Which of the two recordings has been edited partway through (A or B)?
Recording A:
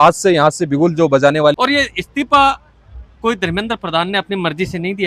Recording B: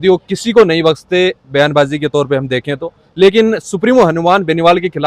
A